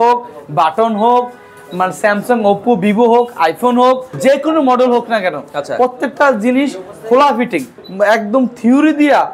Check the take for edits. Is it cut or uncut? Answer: cut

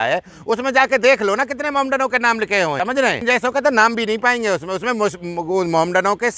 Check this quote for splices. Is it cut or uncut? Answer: cut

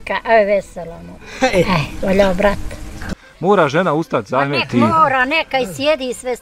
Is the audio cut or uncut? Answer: cut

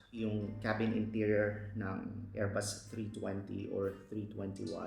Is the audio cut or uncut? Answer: uncut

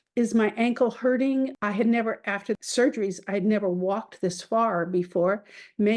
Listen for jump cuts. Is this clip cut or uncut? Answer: cut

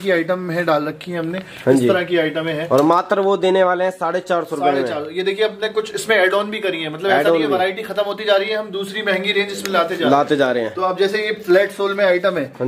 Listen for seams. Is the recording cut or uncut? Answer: uncut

